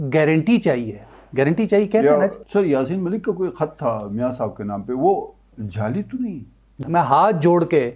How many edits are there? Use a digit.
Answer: 2